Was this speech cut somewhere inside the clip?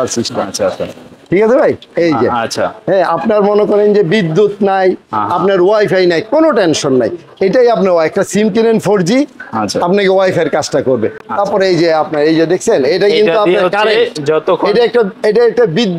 no; 0 cuts

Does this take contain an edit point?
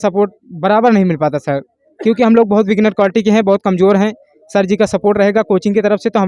no; 0 cuts

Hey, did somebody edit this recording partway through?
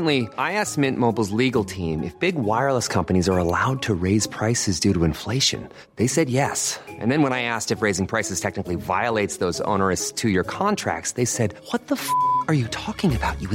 no; 0 cuts

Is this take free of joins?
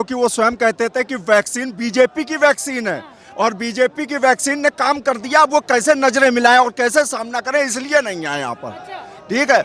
yes; 0 cuts

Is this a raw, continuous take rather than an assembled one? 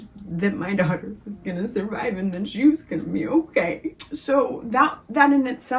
no; 1 cut; at 3.9 s

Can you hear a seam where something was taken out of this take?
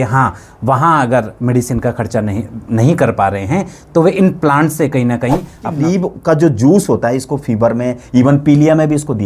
yes; 1 cut; at 5.8 s

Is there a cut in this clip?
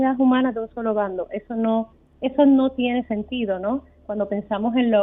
no; 0 cuts

